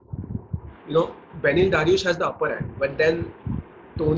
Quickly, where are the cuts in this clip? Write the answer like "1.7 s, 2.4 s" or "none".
none